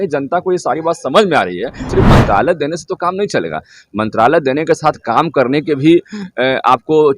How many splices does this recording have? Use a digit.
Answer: 1